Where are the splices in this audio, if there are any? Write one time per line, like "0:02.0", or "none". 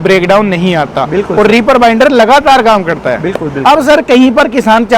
none